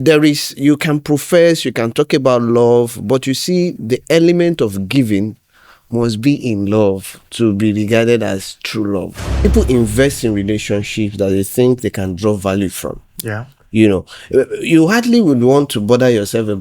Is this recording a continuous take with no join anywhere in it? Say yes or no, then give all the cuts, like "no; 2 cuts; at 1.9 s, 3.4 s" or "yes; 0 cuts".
no; 1 cut; at 9.3 s